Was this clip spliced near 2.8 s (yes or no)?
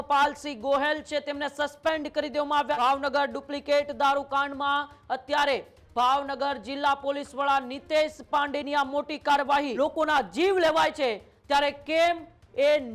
yes